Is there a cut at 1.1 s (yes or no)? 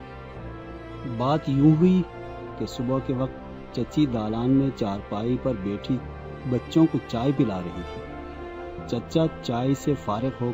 yes